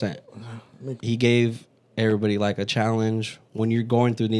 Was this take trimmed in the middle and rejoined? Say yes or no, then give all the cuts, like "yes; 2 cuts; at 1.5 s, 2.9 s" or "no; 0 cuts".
yes; 1 cut; at 1.0 s